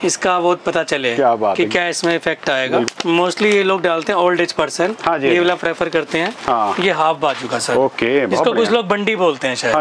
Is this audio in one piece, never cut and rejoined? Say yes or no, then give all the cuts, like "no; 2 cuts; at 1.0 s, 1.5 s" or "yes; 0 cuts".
no; 1 cut; at 2.9 s